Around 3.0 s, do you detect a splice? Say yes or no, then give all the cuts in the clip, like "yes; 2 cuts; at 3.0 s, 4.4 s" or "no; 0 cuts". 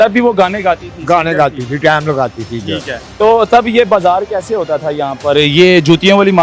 yes; 1 cut; at 3.0 s